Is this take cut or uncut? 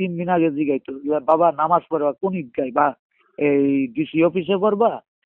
uncut